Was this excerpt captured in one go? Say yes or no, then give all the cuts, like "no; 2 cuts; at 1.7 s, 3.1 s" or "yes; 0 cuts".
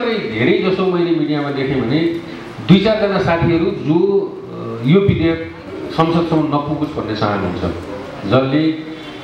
yes; 0 cuts